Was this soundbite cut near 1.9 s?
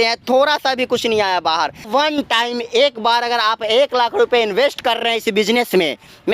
yes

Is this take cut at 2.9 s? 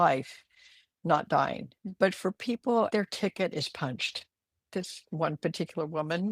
yes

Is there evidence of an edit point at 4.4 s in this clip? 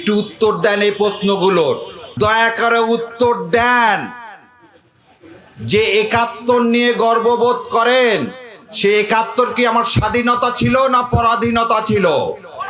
no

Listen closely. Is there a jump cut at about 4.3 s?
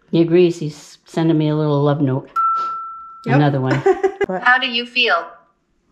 yes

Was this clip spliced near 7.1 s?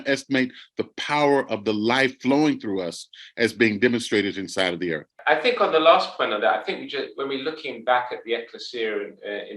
no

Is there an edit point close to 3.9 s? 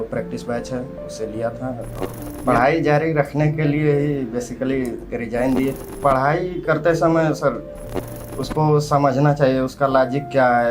no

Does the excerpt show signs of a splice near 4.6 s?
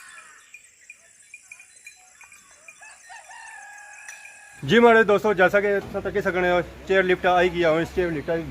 yes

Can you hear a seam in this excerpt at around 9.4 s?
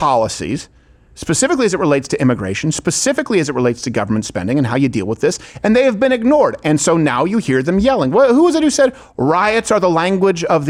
no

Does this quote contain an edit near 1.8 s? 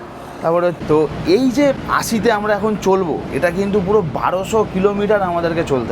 yes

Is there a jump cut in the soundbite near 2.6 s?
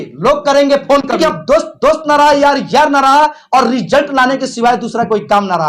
no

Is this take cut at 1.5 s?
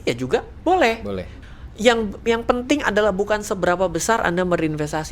yes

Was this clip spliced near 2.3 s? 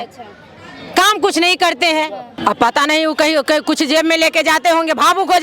yes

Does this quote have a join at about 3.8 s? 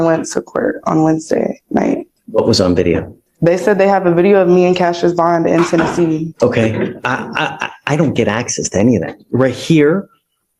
no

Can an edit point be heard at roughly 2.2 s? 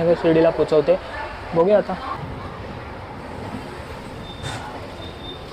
yes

